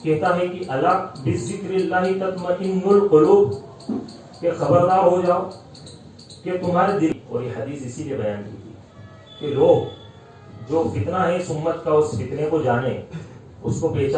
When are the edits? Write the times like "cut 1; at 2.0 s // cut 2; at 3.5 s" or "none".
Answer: cut 1; at 7.1 s